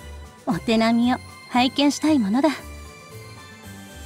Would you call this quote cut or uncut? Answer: cut